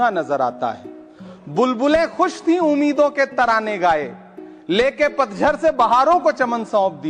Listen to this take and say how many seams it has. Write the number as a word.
zero